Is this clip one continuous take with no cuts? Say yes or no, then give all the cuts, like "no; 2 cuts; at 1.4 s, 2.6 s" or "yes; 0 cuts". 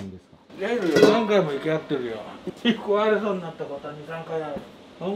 yes; 0 cuts